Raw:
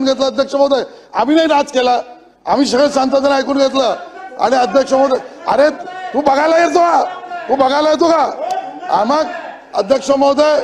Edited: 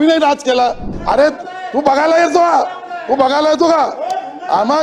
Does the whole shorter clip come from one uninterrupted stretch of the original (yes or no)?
no